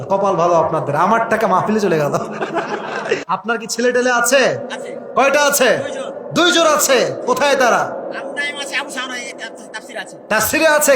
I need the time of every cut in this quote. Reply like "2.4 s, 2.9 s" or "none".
3.2 s